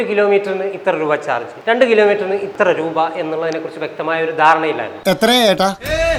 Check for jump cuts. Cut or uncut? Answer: uncut